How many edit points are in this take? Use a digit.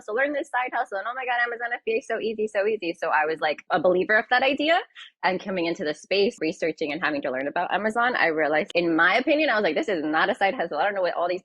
3